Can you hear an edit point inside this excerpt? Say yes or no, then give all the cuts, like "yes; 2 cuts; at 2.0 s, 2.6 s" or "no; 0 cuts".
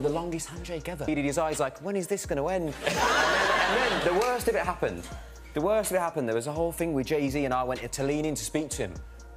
yes; 1 cut; at 1.1 s